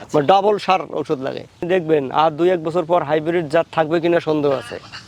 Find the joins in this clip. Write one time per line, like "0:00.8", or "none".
0:01.6